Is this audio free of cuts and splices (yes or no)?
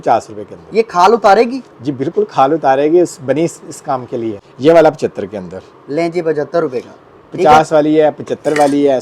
no